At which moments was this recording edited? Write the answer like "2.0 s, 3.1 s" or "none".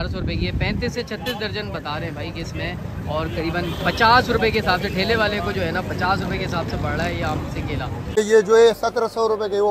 8.2 s

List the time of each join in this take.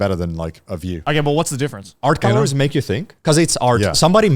1.0 s, 1.9 s

